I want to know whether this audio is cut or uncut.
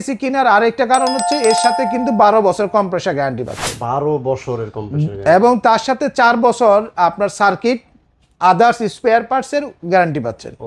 uncut